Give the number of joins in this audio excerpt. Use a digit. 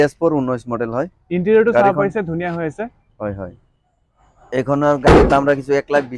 1